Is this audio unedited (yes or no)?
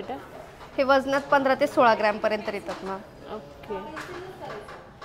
yes